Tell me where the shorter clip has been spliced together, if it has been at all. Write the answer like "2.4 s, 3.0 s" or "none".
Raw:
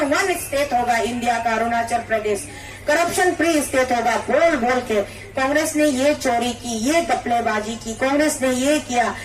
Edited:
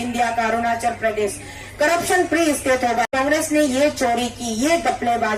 3.1 s